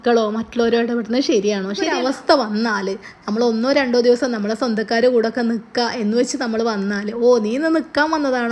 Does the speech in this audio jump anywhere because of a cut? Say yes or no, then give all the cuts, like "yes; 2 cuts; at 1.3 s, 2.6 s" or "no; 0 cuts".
yes; 1 cut; at 1.9 s